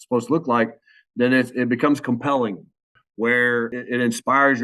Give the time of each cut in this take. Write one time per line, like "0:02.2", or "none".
0:03.0
0:03.8